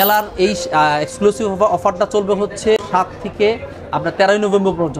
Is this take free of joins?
yes; 0 cuts

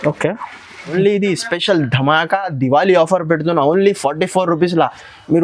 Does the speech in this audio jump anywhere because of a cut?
yes; 1 cut; at 0.9 s

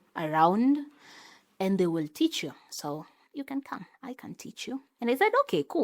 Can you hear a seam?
yes; 1 cut; at 4.9 s

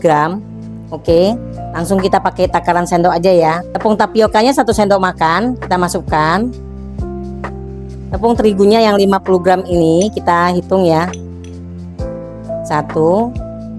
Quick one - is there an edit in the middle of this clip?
no; 0 cuts

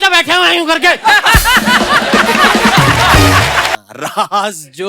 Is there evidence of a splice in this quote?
yes; 1 cut; at 3.7 s

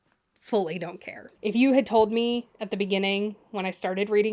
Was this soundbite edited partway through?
yes; 1 cut; at 1.3 s

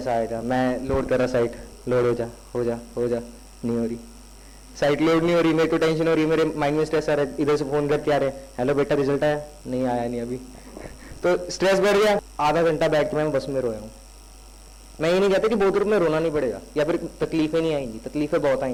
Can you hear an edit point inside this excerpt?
no; 0 cuts

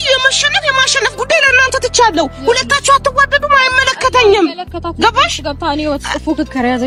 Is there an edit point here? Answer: no; 0 cuts

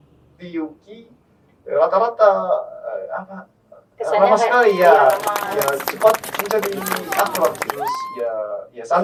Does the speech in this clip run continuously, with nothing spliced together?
yes; 0 cuts

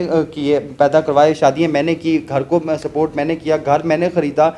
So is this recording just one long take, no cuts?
yes; 0 cuts

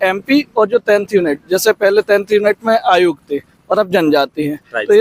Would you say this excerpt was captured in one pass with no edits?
yes; 0 cuts

